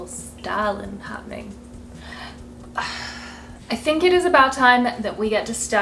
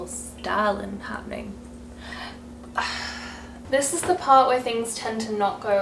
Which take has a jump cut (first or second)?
second